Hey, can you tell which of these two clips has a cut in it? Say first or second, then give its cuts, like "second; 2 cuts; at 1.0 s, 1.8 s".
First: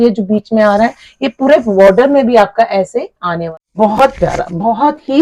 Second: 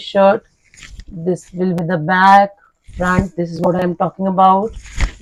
first; 1 cut; at 3.4 s